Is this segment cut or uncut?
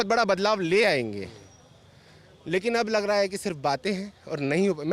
uncut